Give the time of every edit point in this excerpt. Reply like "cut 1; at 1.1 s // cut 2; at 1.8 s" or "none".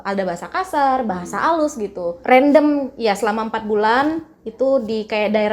cut 1; at 2.1 s